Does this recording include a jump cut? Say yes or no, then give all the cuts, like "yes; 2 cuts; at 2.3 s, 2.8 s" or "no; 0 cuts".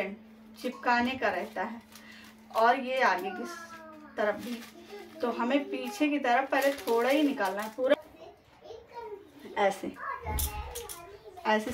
yes; 1 cut; at 7.9 s